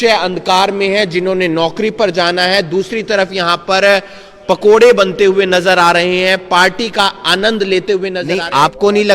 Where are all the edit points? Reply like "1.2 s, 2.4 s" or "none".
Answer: 8.2 s